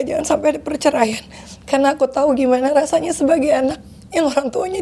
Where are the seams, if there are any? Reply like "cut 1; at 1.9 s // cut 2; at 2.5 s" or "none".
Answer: none